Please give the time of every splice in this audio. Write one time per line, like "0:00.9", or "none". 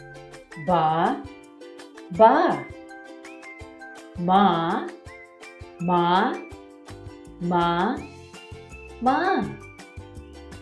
0:09.6